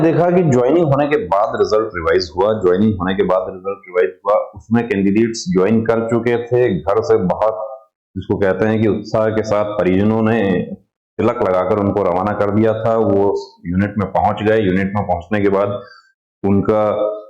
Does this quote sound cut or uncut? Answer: uncut